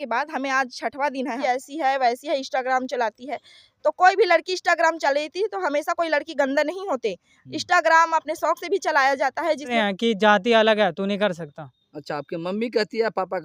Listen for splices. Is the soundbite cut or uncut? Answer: cut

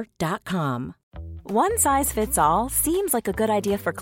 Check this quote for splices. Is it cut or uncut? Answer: cut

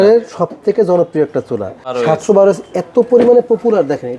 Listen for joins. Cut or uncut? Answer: cut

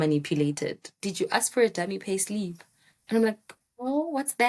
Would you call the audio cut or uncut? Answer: cut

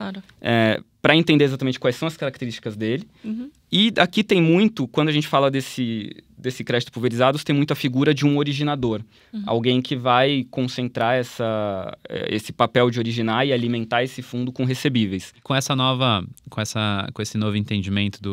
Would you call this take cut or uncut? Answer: cut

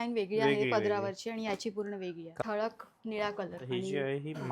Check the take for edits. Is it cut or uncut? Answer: cut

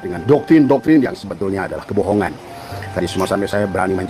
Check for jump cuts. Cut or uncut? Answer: uncut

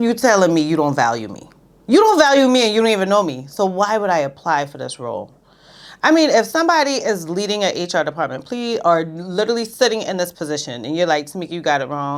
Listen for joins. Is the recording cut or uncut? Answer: uncut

